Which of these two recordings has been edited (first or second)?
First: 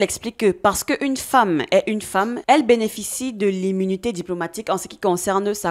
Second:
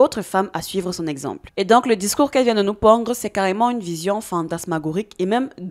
second